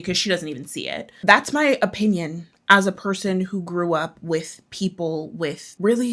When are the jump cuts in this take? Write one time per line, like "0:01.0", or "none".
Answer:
0:01.2